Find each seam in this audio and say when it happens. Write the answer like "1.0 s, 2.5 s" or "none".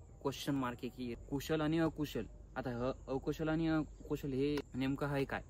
1.1 s, 4.6 s